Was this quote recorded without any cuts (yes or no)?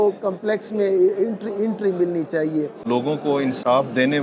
no